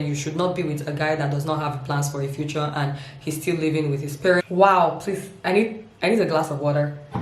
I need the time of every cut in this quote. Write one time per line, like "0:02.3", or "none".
0:04.4